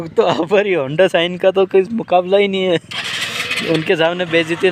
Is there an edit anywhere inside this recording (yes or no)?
no